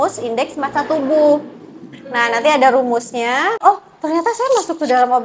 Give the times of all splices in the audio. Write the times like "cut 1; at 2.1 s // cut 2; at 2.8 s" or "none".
cut 1; at 3.6 s

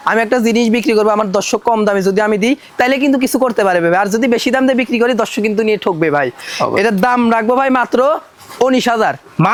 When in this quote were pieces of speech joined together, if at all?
none

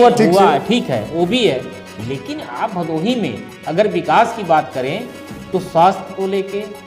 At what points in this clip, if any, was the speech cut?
none

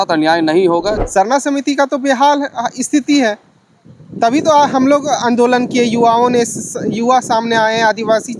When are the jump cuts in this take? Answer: cut 1; at 1.0 s

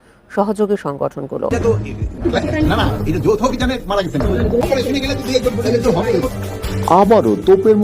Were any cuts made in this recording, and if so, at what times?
cut 1; at 4.6 s

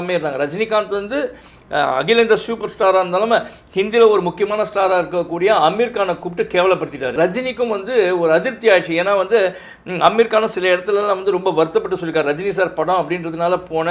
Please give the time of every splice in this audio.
cut 1; at 7.1 s

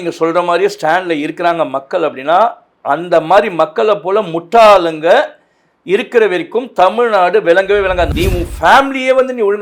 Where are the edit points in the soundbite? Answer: cut 1; at 8.1 s

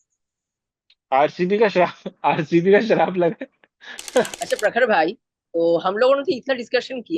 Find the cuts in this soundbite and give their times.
cut 1; at 4.3 s

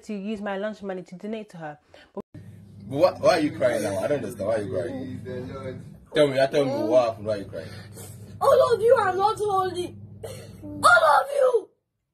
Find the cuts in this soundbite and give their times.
cut 1; at 2.2 s

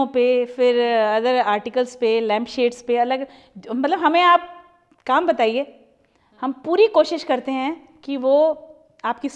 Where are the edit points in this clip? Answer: none

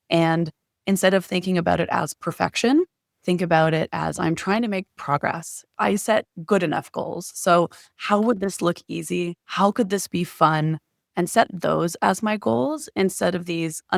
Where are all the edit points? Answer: cut 1; at 5.6 s

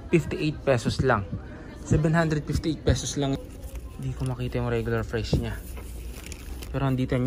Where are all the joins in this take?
cut 1; at 3.4 s

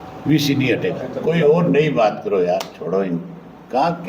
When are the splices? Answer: cut 1; at 1.1 s

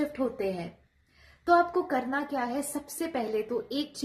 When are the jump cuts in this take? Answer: none

